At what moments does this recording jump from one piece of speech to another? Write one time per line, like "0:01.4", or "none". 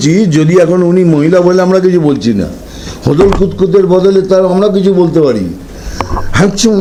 none

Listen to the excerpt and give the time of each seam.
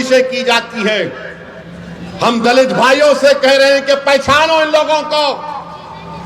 none

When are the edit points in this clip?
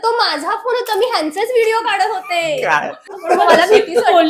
0:03.0

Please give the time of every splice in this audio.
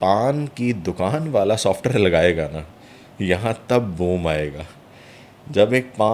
none

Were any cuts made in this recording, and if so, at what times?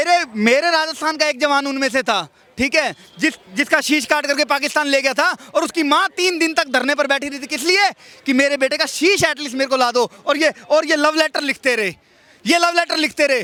none

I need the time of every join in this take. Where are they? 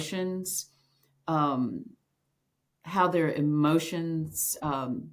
none

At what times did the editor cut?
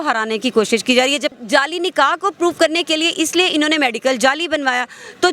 0:01.3

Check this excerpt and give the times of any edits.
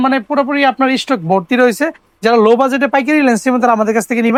none

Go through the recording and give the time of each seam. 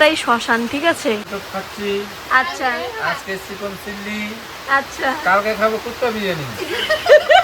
0:01.3
0:06.5

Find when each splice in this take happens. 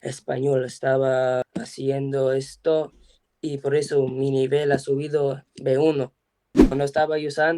0:06.6

